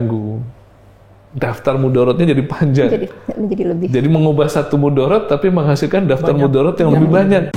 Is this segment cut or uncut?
uncut